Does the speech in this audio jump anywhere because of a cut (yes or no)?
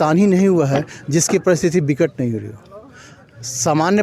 no